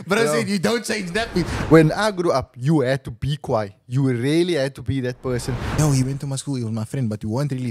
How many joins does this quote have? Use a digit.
2